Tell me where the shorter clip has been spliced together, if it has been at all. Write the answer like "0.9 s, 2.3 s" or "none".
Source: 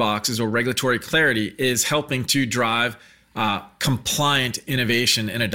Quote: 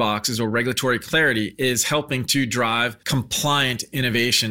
3.0 s